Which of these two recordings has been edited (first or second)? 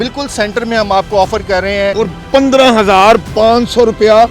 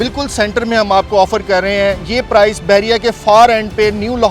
first